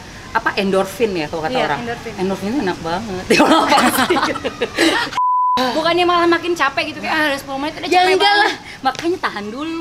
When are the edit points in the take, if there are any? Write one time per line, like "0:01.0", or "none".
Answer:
0:05.5